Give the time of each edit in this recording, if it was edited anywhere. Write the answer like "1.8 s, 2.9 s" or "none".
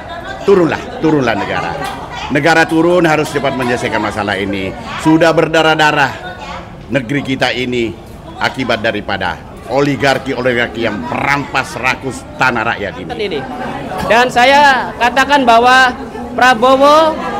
13.4 s